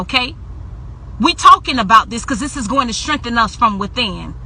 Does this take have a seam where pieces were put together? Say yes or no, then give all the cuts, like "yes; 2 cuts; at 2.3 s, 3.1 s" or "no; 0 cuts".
yes; 1 cut; at 3.5 s